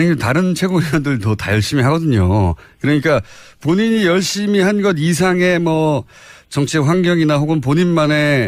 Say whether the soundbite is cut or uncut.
uncut